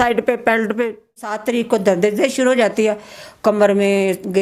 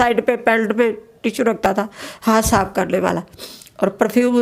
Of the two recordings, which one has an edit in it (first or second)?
first